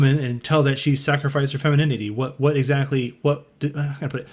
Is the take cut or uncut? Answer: uncut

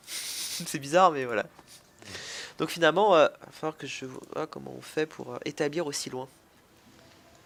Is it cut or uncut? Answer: uncut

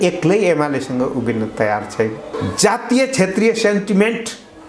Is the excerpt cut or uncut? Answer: cut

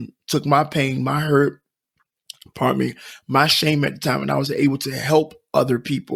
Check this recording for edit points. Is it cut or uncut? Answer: uncut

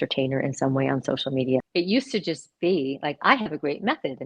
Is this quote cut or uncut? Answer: cut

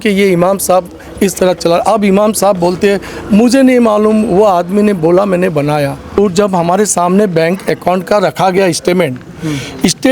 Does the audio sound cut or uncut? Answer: cut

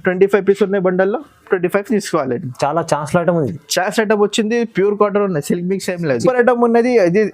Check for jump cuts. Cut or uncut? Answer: cut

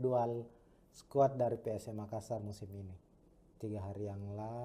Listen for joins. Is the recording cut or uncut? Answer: uncut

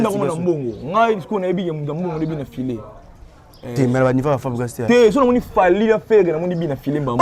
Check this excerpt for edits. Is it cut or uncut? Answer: uncut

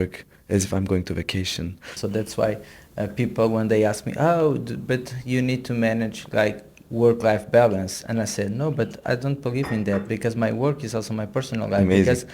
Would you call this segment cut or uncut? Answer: cut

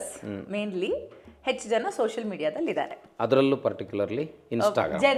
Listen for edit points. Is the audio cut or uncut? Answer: uncut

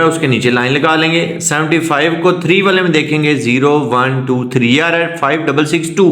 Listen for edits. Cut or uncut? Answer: uncut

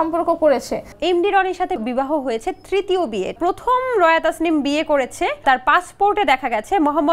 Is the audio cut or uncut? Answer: cut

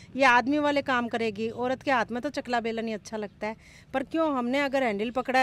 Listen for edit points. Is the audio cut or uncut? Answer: uncut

